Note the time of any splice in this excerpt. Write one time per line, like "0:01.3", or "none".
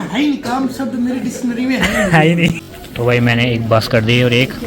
0:02.5